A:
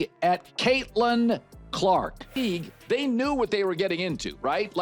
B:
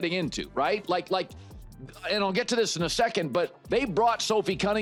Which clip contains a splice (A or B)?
A